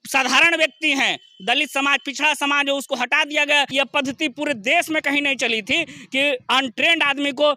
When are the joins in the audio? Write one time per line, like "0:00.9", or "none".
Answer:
0:03.7